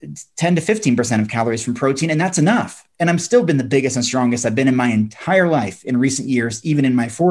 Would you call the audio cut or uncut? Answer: uncut